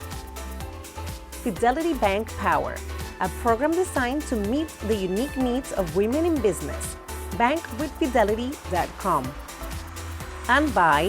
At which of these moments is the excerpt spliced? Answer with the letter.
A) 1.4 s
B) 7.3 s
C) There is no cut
A